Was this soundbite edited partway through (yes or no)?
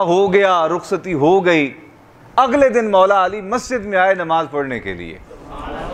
no